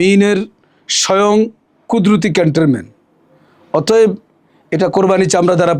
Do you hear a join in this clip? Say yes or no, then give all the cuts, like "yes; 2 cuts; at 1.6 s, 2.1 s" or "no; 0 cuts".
no; 0 cuts